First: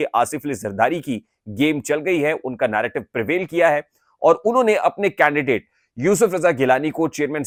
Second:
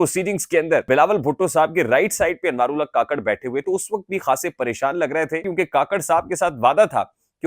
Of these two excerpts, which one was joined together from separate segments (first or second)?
second